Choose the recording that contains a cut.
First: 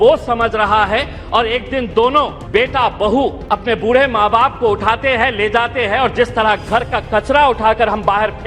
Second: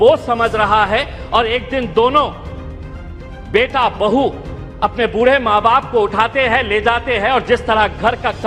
first; 2 cuts; at 2.4 s, 3.4 s

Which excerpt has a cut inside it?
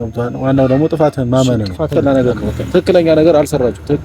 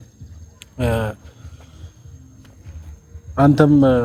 first; 1 cut; at 1.9 s

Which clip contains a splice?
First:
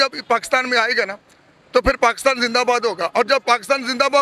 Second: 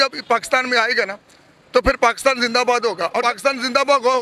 second; 1 cut; at 3.1 s

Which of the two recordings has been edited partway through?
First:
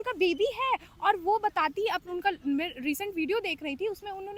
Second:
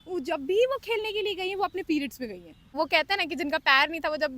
second; 1 cut; at 2.8 s

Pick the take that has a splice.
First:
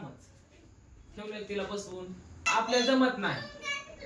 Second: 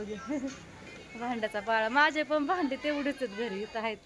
first; 1 cut; at 2.4 s

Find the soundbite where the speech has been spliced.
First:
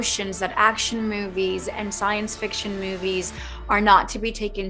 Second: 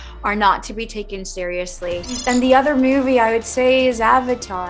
second; 1 cut; at 2.2 s

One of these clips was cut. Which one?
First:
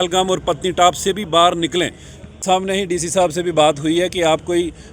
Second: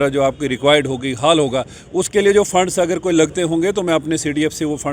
first; 1 cut; at 2.4 s

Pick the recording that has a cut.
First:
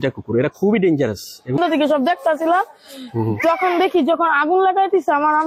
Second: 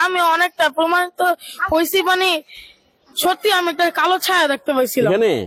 first; 1 cut; at 1.6 s

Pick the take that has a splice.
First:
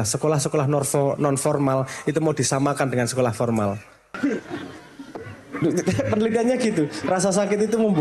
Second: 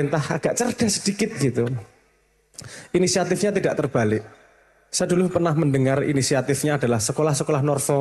first; 1 cut; at 4.1 s

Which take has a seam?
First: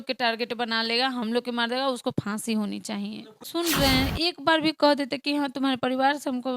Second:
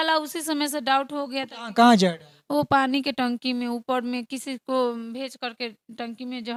first; 1 cut; at 3.4 s

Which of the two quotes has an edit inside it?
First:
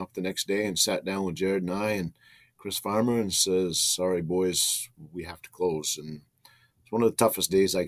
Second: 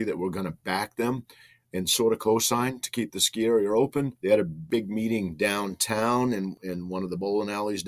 second; 2 cuts; at 4.5 s, 6.6 s

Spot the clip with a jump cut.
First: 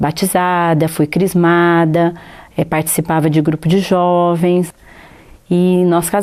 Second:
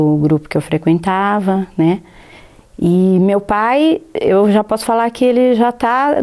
second; 1 cut; at 1.4 s

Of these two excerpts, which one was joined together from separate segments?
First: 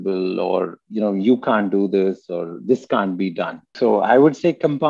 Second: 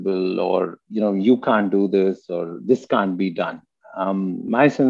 first; 1 cut; at 3.7 s

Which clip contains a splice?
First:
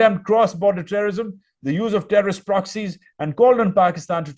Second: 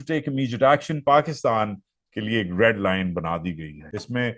second; 1 cut; at 1.0 s

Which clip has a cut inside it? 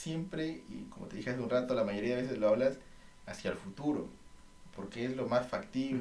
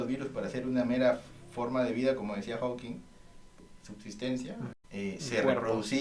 second; 2 cuts; at 3.6 s, 4.8 s

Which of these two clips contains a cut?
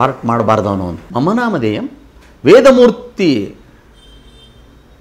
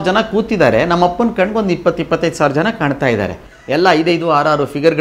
first; 1 cut; at 1.0 s

